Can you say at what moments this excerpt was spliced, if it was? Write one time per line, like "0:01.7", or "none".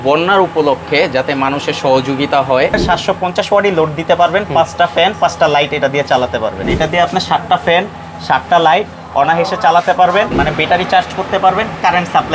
0:02.8
0:06.7
0:10.3